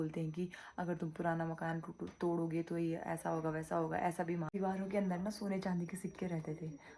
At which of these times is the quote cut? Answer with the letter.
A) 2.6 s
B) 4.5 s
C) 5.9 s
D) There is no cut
B